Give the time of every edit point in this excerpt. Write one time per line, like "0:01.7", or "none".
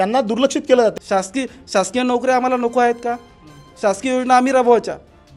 0:01.0